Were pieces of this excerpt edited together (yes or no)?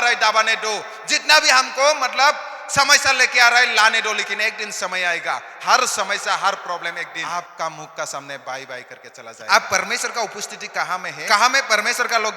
yes